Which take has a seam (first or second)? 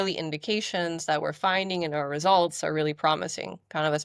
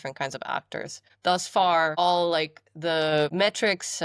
second